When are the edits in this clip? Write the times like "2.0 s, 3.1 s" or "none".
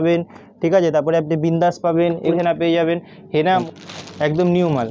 2.3 s, 3.6 s